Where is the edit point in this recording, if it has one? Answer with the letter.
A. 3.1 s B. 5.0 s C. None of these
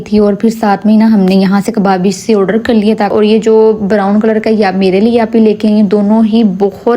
A